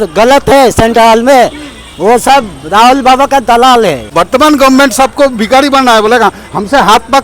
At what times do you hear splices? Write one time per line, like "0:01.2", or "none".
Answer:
0:04.0